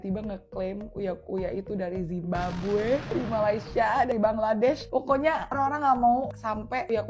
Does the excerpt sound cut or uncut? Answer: uncut